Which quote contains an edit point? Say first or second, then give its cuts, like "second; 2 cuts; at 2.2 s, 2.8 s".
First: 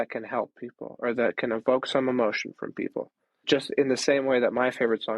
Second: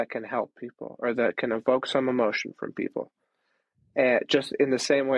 first; 1 cut; at 3.4 s